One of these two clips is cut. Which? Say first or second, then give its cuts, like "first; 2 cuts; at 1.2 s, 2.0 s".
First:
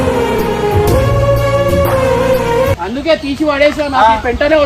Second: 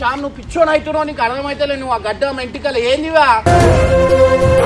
first; 1 cut; at 2.8 s